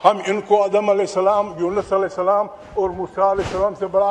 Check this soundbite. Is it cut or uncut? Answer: uncut